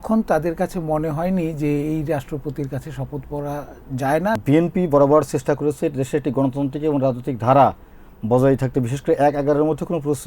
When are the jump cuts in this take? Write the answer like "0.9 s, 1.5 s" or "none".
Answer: 4.4 s